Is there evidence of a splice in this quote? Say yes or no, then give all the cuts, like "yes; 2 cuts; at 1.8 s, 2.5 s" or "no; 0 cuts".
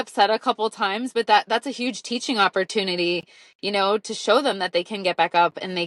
no; 0 cuts